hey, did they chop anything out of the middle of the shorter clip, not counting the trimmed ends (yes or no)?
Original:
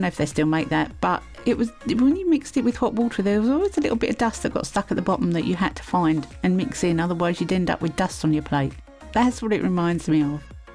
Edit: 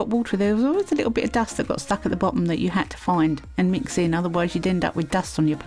no